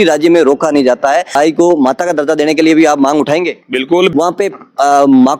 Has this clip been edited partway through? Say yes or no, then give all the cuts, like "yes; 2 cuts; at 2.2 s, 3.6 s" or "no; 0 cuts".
yes; 2 cuts; at 1.3 s, 4.1 s